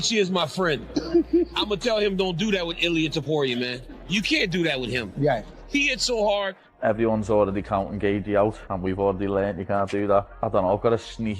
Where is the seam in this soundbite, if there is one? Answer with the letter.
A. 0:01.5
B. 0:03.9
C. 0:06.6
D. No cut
C